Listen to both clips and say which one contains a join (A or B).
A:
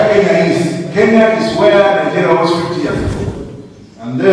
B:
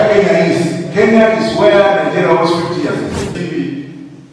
B